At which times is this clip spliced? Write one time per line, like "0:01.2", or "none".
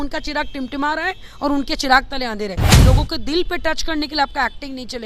0:02.7